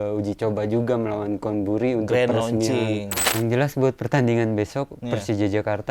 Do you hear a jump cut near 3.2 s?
yes; 1 cut; at 3.2 s

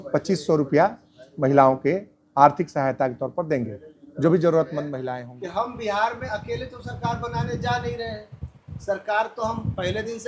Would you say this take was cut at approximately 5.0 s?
yes; 1 cut; at 5.0 s

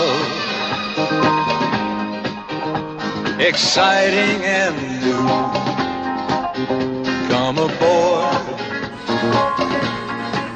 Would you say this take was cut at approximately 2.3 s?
no; 1 cut; at 7.6 s

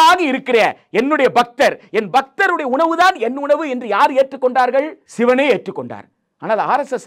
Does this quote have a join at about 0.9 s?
no; 1 cut; at 5.0 s

